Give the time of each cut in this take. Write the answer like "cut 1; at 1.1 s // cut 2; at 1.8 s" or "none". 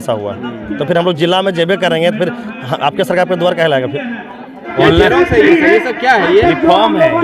cut 1; at 4.8 s